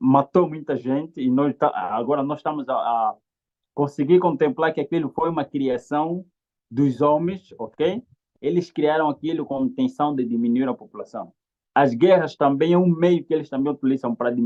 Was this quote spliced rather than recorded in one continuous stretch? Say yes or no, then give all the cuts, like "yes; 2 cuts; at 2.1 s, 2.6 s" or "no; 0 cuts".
no; 0 cuts